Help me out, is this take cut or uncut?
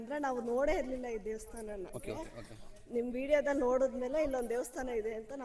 cut